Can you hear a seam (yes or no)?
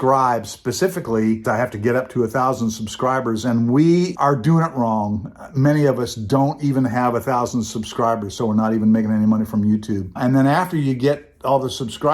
yes